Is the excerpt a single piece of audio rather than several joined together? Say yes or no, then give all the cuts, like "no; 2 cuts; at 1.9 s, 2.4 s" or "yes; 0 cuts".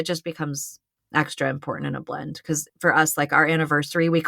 no; 1 cut; at 2.7 s